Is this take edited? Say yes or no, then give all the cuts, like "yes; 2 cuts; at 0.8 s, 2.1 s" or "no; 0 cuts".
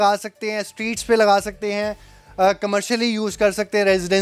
no; 0 cuts